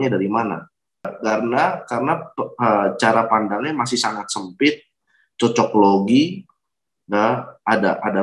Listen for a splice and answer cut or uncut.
cut